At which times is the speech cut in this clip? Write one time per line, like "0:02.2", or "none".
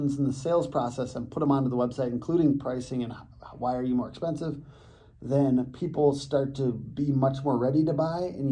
none